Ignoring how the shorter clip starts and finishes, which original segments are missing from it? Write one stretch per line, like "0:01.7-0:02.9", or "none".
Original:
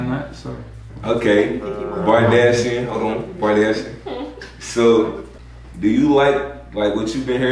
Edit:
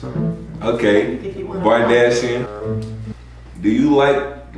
0:03.4-0:05.1